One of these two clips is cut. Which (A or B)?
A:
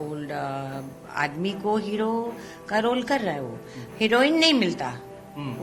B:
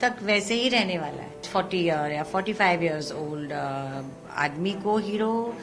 B